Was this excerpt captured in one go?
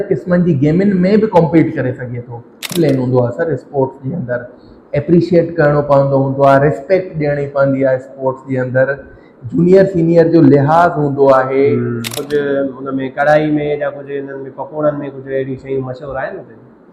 no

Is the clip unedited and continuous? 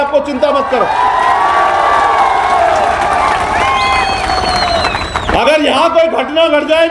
no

